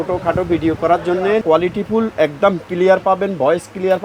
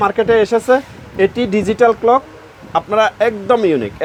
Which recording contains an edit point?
first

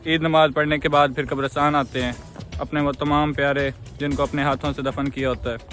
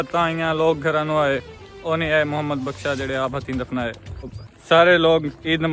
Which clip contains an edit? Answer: second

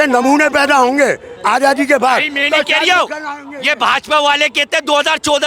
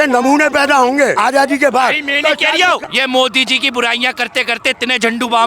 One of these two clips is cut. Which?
second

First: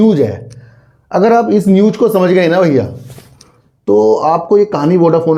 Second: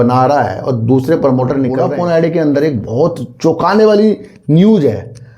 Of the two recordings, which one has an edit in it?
second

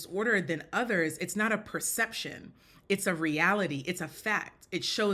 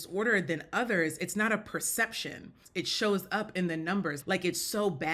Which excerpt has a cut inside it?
second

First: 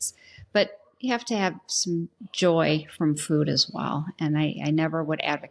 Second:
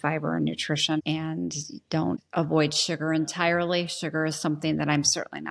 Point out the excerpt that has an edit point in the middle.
second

